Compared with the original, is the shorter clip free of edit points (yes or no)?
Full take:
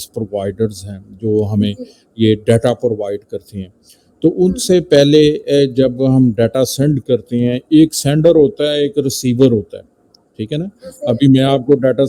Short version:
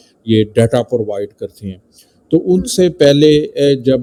yes